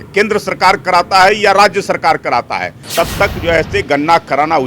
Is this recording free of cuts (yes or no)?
no